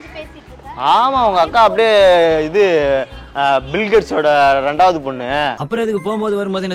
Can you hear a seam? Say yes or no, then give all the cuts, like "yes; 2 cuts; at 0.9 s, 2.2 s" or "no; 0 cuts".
no; 0 cuts